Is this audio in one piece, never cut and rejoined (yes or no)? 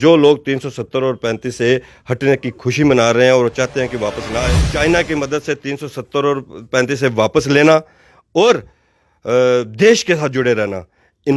no